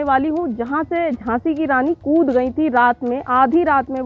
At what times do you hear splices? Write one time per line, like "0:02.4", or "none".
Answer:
none

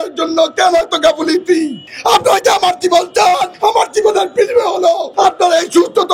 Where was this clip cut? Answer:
0:01.8
0:03.5
0:05.1

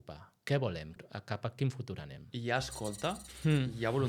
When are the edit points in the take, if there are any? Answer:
0:00.9
0:03.3

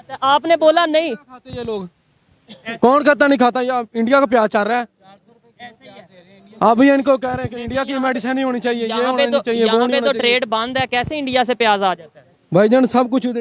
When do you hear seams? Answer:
none

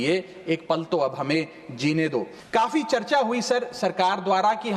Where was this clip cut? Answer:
0:02.4

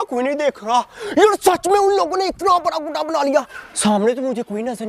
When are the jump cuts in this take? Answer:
0:03.6

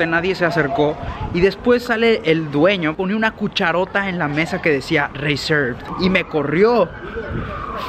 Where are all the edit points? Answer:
0:02.9
0:05.8

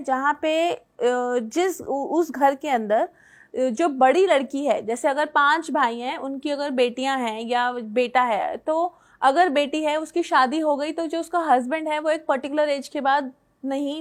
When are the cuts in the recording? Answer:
none

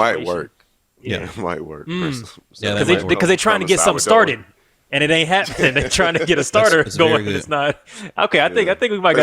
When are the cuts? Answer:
none

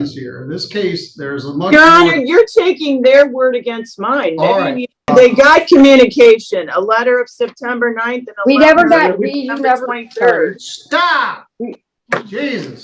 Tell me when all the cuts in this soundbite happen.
0:05.1

